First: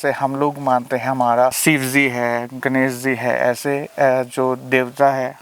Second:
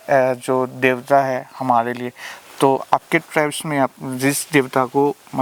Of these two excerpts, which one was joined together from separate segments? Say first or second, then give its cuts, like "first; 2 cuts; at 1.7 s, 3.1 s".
first; 1 cut; at 1.6 s